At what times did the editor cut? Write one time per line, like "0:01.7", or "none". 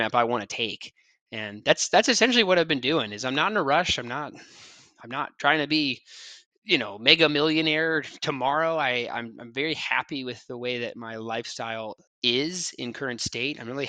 0:11.8